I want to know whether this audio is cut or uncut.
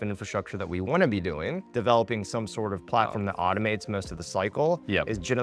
cut